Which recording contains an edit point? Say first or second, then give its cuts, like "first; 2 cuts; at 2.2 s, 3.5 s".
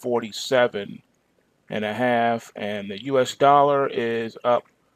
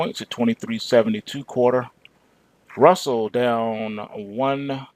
second; 1 cut; at 2.6 s